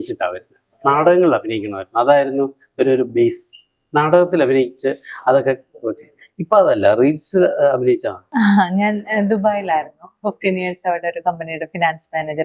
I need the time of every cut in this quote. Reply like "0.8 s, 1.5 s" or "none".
8.2 s